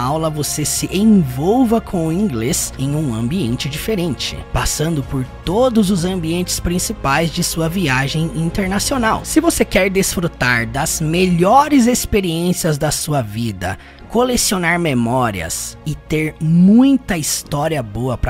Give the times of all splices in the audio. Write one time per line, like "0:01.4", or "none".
0:09.2